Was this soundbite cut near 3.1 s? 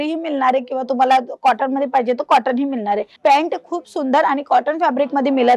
yes; 1 cut; at 3.1 s

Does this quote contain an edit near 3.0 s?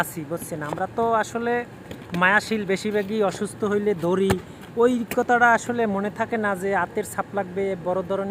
no; 0 cuts

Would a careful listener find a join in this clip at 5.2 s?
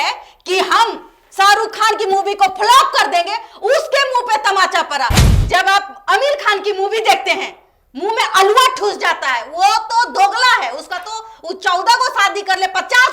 yes; 1 cut; at 5.2 s

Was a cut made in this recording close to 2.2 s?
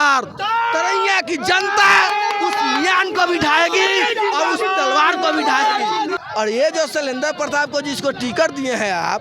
no; 1 cut; at 6.2 s

